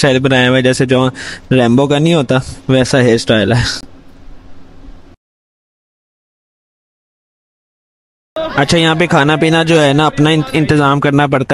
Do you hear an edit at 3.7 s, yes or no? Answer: no